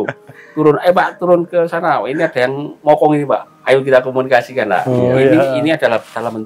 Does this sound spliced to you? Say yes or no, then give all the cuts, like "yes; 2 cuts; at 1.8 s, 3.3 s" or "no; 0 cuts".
no; 0 cuts